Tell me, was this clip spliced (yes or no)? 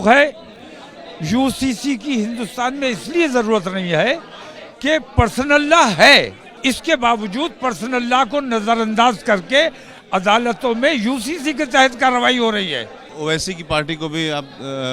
yes